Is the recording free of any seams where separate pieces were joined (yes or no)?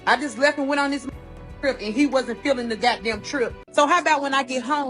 no